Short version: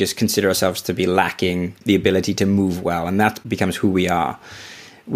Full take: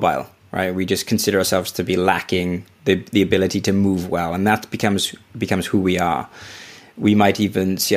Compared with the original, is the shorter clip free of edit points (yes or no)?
no